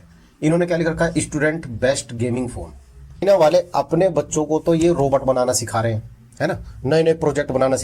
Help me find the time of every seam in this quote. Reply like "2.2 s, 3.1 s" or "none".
3.2 s

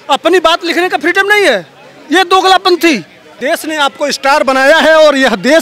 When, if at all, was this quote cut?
3.4 s

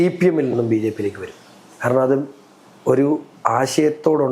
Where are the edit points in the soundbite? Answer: none

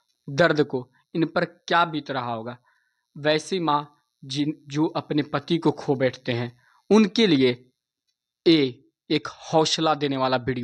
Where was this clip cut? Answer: none

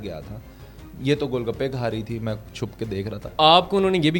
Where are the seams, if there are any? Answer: 3.2 s

